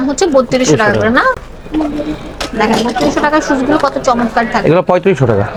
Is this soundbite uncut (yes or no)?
yes